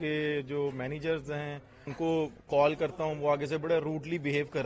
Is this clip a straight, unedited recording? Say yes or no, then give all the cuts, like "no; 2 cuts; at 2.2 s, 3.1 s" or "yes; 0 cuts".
no; 1 cut; at 1.9 s